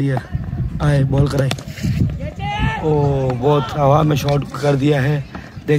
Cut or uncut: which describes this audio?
uncut